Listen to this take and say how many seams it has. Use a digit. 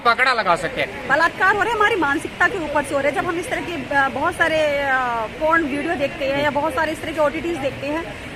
1